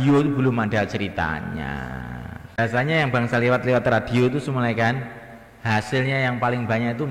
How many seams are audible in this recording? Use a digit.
1